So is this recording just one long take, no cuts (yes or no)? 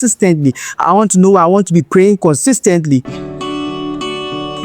no